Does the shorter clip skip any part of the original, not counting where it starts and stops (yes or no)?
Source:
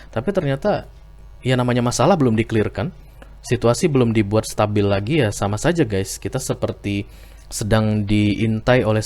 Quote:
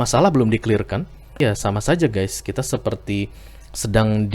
yes